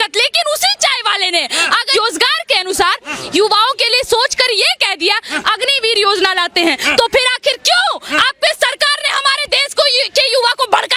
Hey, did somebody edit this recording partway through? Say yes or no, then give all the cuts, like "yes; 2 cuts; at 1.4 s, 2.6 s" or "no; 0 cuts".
yes; 1 cut; at 1.9 s